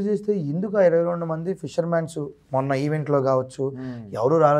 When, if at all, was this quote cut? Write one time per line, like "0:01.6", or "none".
none